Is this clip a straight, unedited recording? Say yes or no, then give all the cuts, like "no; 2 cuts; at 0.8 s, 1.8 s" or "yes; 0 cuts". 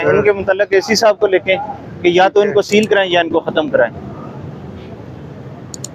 yes; 0 cuts